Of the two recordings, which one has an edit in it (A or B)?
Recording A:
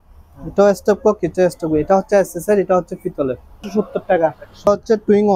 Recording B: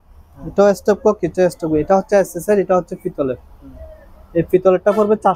A